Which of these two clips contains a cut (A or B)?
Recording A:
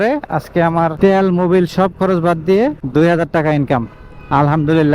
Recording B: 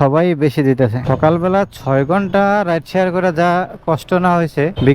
B